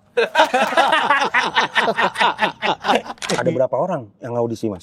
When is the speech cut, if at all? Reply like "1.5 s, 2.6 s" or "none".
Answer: 3.3 s